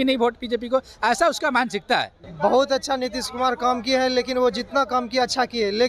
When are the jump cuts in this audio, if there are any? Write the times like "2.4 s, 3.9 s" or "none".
2.2 s

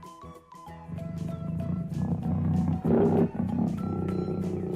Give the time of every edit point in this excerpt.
0.9 s

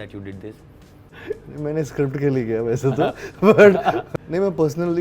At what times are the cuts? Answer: 1.1 s, 4.0 s

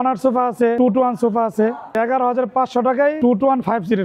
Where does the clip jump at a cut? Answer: 0.8 s, 2.0 s, 3.2 s

